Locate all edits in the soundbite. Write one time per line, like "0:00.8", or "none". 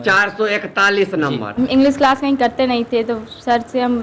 0:01.5